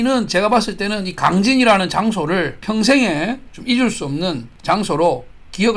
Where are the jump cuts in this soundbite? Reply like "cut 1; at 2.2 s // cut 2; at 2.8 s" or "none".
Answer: cut 1; at 2.6 s // cut 2; at 4.5 s